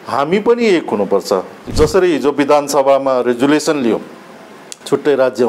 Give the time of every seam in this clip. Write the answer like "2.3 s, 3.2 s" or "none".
1.6 s